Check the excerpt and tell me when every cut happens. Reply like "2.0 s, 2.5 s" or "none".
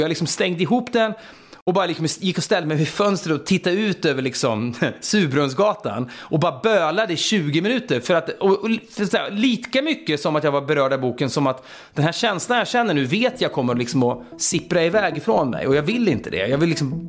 none